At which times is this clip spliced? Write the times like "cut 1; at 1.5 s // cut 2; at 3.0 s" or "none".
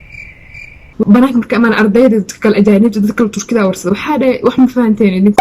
cut 1; at 1.0 s